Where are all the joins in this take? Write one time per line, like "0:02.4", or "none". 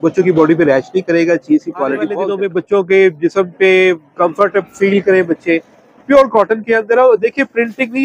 0:02.3